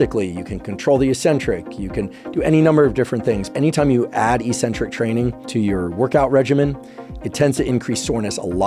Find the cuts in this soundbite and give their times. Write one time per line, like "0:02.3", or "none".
0:03.5
0:05.4